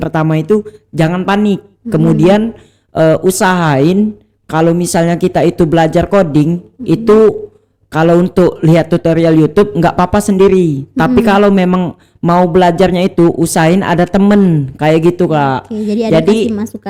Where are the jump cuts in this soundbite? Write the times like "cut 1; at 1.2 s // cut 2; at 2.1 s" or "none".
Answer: none